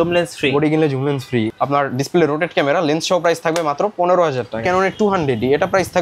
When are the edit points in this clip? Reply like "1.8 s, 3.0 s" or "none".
1.5 s, 4.6 s